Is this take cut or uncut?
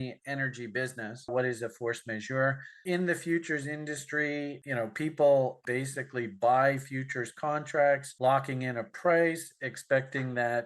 cut